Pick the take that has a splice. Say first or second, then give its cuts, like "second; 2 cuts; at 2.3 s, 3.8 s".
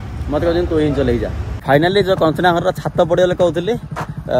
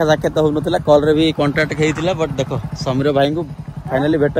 first; 1 cut; at 1.5 s